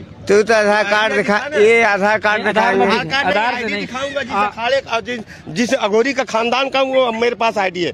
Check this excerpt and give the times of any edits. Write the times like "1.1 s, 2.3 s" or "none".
none